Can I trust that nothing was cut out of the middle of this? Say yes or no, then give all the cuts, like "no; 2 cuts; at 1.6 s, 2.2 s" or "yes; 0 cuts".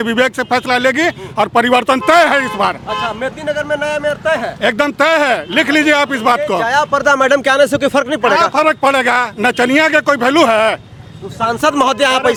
yes; 0 cuts